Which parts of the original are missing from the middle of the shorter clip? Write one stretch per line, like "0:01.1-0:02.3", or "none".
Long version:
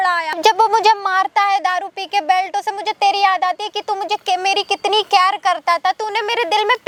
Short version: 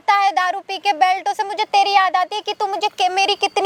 none